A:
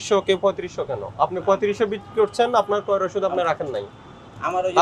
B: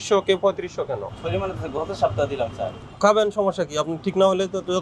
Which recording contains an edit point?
B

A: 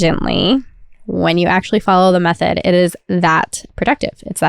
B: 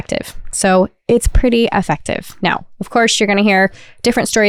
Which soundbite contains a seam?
A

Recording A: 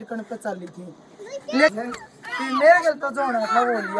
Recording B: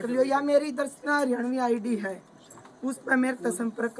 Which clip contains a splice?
A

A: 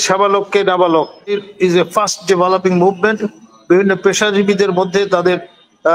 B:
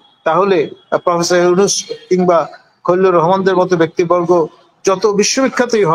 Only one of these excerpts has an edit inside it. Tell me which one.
A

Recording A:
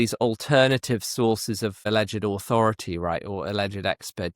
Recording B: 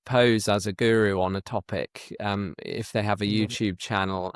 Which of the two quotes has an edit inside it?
A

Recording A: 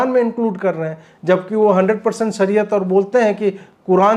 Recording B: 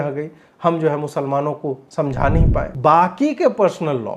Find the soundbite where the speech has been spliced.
B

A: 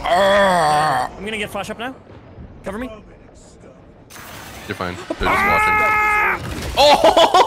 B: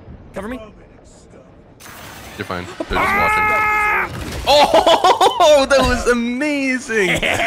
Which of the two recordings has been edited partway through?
A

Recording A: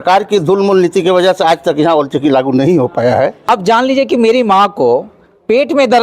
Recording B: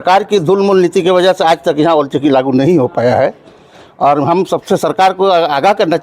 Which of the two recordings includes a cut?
A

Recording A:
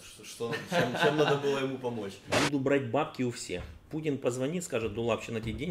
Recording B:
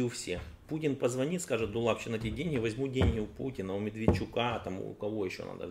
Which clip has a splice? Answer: A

